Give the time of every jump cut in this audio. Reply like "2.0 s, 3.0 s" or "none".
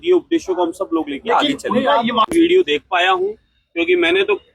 2.2 s